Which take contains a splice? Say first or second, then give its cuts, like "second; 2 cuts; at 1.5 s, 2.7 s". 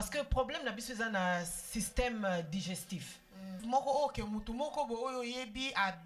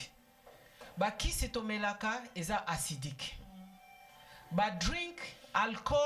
first; 1 cut; at 3.6 s